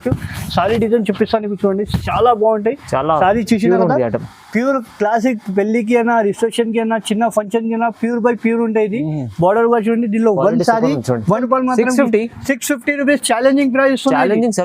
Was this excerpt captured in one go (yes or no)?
no